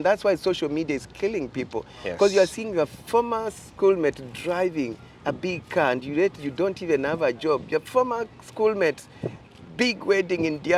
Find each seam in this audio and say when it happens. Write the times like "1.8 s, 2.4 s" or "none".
none